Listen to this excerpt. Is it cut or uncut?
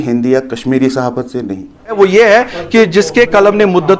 cut